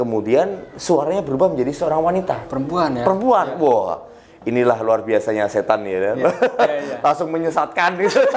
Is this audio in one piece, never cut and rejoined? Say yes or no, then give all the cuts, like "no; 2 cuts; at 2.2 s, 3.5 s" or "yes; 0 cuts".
yes; 0 cuts